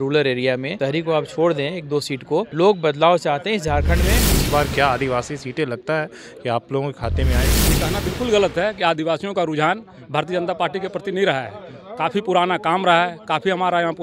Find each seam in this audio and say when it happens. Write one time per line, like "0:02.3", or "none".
0:02.5
0:04.2
0:07.6